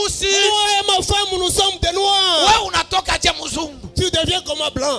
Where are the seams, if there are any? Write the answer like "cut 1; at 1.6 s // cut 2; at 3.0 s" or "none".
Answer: none